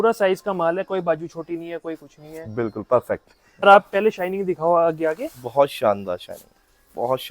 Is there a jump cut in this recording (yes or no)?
yes